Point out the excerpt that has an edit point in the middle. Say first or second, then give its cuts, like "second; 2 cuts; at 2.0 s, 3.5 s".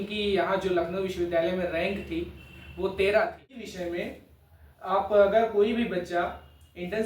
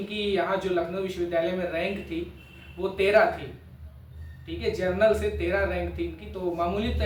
first; 1 cut; at 3.7 s